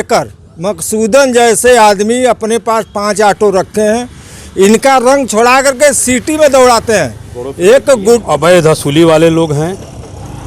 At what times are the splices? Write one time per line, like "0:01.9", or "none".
0:08.2